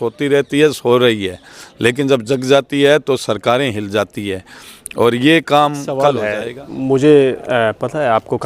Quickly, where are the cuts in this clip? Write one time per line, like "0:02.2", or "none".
0:06.3

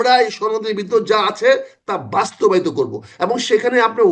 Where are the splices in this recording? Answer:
none

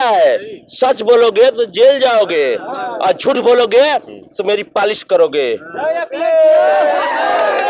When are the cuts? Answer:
none

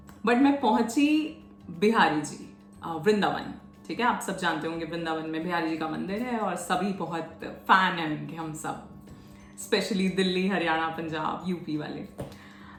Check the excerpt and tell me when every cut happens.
none

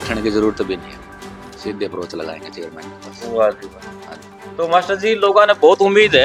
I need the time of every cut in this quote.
none

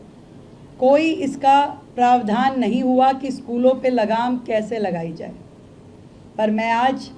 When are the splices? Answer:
none

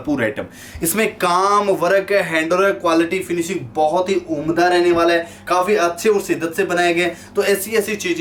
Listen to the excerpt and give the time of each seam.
none

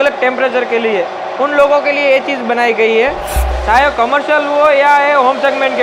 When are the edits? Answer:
0:03.4

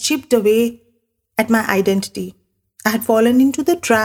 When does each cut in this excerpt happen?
none

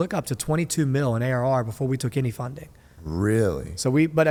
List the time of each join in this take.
none

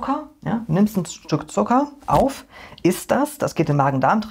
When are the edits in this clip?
none

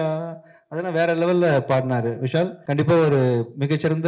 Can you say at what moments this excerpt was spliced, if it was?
0:02.6

